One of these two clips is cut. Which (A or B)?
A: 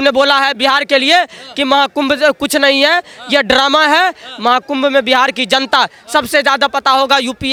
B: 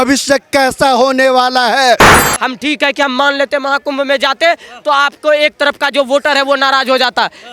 B